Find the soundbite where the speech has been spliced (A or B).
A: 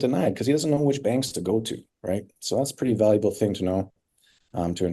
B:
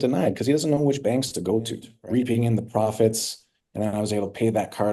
B